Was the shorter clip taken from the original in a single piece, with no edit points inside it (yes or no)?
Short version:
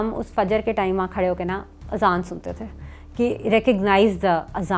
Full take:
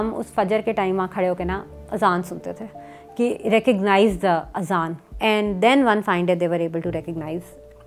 yes